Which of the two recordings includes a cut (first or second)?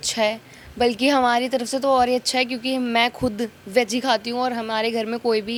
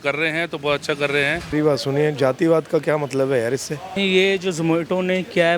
second